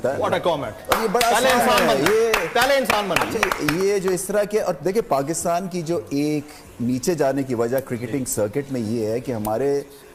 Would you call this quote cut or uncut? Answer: uncut